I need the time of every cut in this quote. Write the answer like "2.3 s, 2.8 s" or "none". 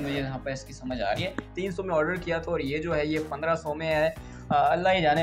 1.5 s